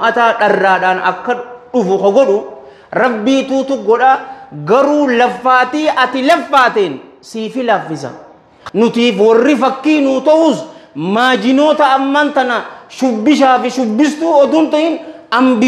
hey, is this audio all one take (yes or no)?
no